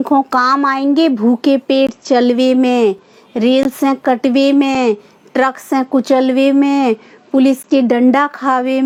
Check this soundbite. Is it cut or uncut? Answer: uncut